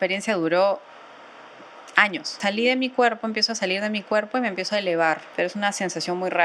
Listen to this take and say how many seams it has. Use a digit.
2